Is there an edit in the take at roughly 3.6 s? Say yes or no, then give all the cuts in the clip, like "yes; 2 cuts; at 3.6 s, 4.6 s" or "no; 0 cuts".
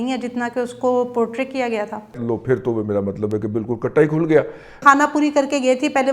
no; 2 cuts; at 2.2 s, 4.8 s